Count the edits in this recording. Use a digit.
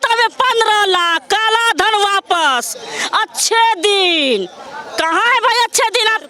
0